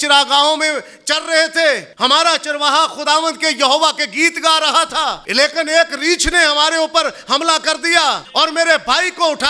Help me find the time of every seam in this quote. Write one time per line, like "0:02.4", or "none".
0:01.9
0:05.2
0:08.2